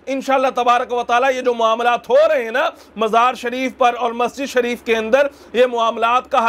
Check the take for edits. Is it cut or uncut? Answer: uncut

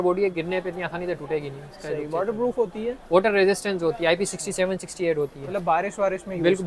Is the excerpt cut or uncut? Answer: uncut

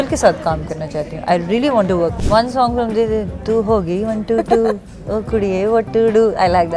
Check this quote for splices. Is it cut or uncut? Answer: cut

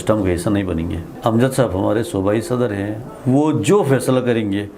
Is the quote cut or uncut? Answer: cut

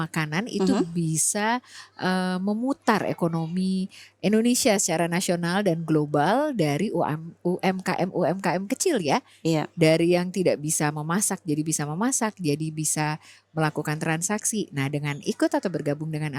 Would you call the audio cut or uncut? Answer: uncut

